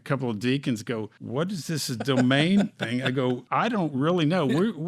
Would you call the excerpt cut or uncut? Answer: cut